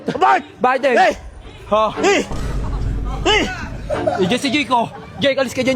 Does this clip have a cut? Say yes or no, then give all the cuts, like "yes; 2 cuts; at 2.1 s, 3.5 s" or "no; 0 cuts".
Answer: no; 0 cuts